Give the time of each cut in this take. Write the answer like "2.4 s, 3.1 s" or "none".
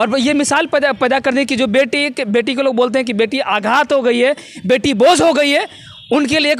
none